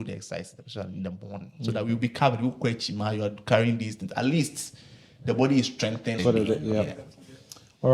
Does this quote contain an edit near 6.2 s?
yes; 1 cut; at 6.2 s

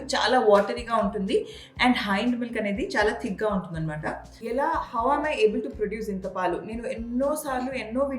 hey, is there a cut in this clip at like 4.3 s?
yes; 1 cut; at 4.3 s

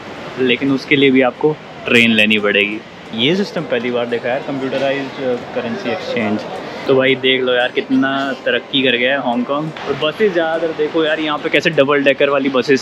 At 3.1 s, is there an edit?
yes; 3 cuts; at 3.1 s, 6.8 s, 9.7 s

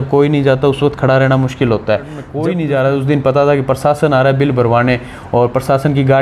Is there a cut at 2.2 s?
yes; 1 cut; at 2.2 s

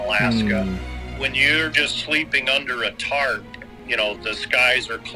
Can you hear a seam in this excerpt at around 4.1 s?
yes; 2 cuts; at 1.2 s, 4.1 s

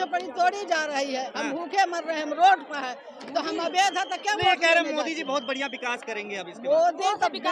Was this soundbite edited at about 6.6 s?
no; 0 cuts

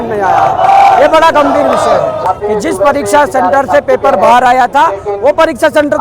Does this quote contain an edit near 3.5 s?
no; 1 cut; at 2.2 s

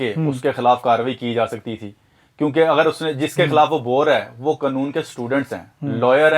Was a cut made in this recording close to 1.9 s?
no; 0 cuts

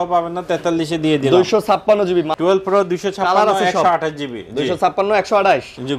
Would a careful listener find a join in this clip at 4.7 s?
no; 1 cut; at 2.3 s

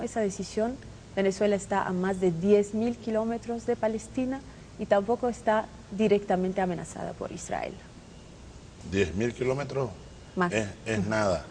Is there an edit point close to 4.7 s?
no; 1 cut; at 8.7 s

